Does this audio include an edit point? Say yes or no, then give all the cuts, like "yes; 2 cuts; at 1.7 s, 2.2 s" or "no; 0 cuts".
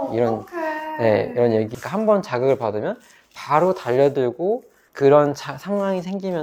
yes; 1 cut; at 1.7 s